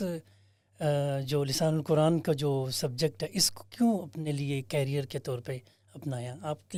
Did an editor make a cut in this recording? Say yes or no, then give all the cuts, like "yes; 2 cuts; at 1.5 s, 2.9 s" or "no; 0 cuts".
no; 0 cuts